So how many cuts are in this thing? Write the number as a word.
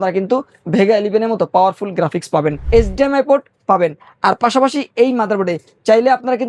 one